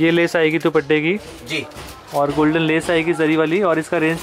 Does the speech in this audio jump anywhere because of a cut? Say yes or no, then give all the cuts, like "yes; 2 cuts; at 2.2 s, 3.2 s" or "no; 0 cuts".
no; 0 cuts